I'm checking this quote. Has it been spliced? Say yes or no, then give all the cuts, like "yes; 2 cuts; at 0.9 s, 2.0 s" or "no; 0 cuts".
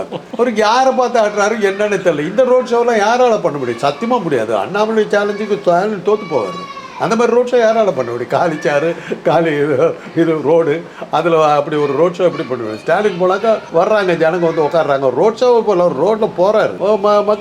no; 0 cuts